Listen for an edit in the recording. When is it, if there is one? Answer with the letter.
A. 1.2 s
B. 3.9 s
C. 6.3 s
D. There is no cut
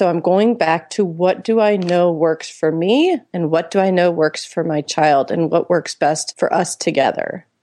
C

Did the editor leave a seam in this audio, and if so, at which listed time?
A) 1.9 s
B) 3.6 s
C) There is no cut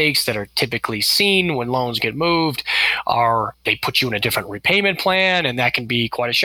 B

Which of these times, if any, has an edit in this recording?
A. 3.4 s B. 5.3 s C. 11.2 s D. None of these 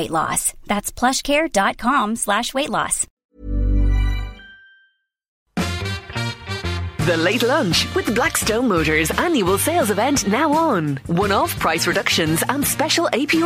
B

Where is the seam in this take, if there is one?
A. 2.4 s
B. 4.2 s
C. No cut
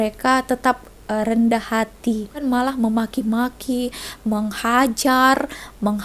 A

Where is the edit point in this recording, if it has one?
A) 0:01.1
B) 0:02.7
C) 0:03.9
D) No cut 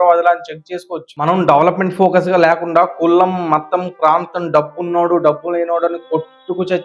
A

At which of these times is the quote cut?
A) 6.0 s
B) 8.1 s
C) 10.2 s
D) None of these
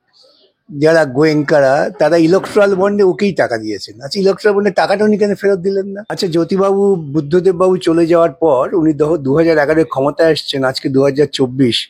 A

